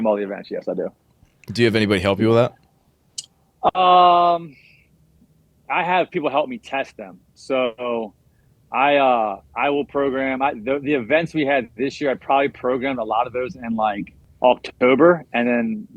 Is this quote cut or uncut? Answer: uncut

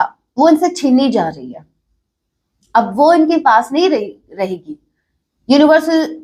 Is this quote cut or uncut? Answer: uncut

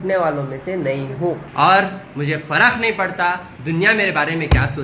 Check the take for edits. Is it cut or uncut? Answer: cut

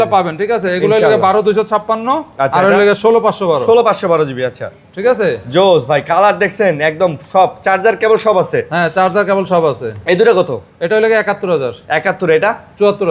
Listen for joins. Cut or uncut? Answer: uncut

